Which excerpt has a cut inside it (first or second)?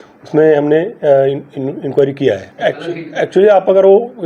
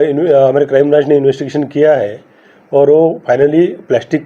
first